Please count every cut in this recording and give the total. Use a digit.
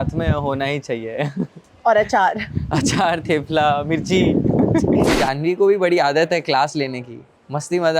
1